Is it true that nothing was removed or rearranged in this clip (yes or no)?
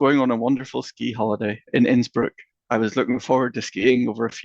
no